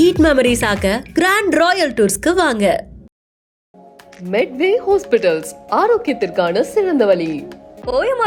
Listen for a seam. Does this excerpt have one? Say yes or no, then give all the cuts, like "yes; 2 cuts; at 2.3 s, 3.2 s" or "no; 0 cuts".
no; 0 cuts